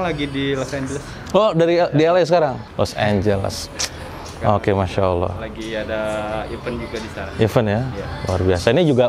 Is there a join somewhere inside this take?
no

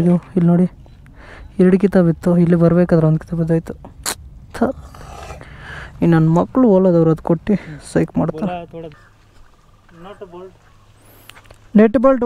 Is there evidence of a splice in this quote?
no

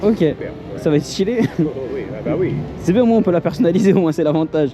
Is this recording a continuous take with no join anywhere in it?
yes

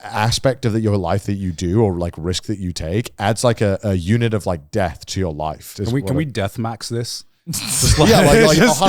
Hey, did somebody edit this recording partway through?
yes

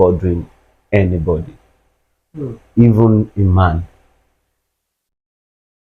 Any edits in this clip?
no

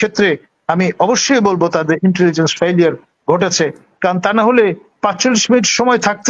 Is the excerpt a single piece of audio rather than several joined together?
yes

